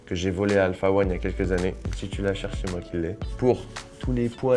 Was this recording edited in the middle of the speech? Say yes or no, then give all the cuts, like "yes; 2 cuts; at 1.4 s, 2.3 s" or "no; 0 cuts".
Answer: no; 0 cuts